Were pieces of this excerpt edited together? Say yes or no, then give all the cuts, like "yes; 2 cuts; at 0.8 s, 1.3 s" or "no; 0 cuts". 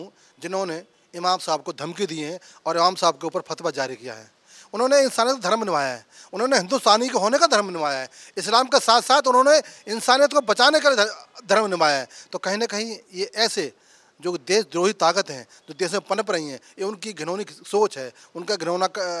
no; 0 cuts